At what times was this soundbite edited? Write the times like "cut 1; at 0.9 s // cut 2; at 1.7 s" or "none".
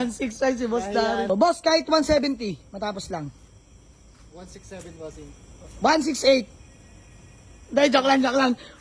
cut 1; at 1.3 s